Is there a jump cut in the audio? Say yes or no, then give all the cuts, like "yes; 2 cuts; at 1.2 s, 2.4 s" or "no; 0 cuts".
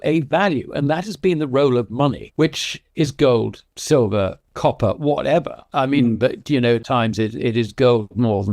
yes; 2 cuts; at 2.2 s, 6.8 s